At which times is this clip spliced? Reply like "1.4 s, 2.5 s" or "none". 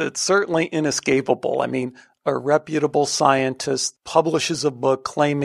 3.9 s

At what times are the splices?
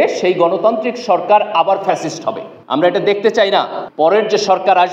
2.5 s, 3.8 s

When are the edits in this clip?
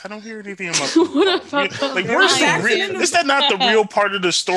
none

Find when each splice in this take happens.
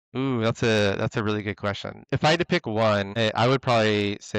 2.0 s, 3.1 s

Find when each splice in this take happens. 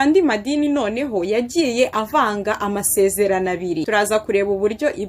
3.8 s

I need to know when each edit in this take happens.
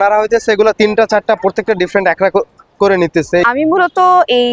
3.4 s

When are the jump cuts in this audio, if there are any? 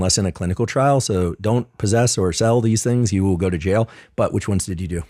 none

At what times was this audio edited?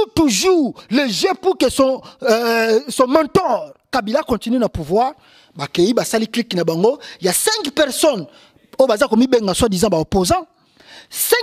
none

